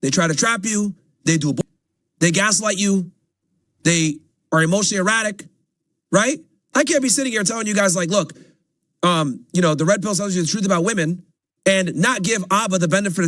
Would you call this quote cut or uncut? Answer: cut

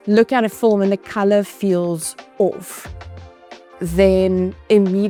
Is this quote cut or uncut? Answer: uncut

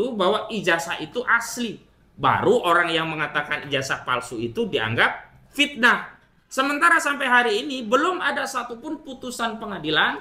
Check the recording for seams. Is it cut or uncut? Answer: uncut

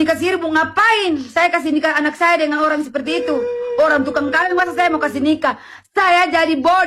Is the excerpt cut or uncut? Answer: uncut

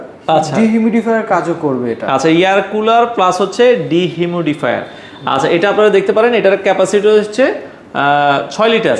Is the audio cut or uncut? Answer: uncut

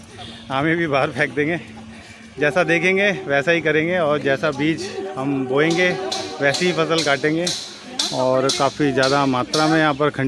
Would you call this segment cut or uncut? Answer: uncut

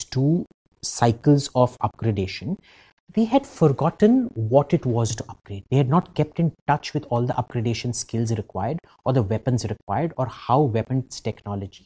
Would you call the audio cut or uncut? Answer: uncut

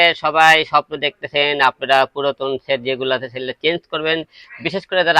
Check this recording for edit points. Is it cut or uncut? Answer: uncut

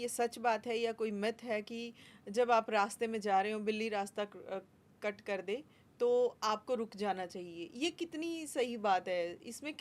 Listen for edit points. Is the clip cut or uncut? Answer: uncut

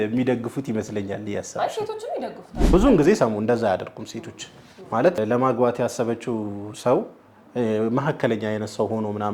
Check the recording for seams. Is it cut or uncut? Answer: cut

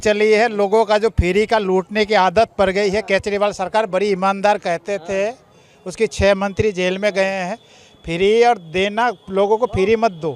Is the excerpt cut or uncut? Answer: uncut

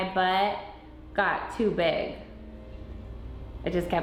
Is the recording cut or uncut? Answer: uncut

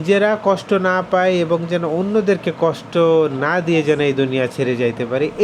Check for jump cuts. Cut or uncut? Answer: uncut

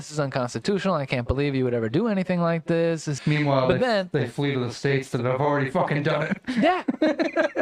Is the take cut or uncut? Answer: cut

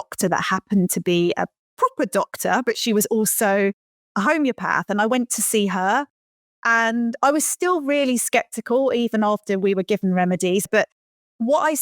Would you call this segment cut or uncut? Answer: cut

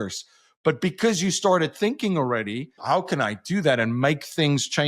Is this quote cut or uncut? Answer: cut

